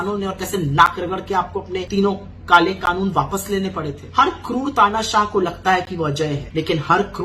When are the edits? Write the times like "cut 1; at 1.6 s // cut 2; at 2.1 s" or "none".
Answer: cut 1; at 1.8 s // cut 2; at 4.0 s // cut 3; at 6.4 s